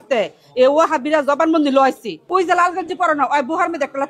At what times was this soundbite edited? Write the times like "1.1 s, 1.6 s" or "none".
2.2 s